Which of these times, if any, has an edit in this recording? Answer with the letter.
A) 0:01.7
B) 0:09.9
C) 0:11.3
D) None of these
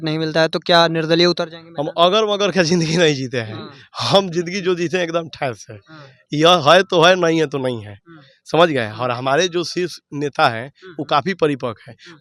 D